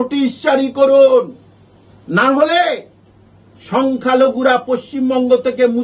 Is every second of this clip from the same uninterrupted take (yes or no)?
yes